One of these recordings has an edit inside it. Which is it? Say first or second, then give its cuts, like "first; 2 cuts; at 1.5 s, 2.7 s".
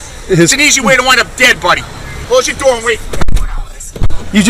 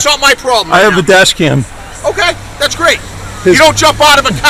first; 1 cut; at 2.1 s